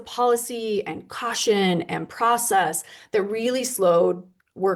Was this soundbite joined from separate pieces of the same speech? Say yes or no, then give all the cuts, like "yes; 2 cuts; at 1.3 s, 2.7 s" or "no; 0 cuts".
no; 0 cuts